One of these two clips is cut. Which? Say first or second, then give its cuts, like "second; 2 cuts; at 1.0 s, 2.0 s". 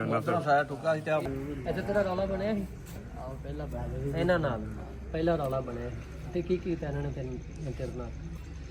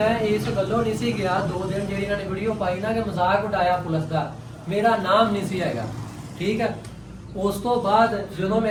first; 1 cut; at 1.2 s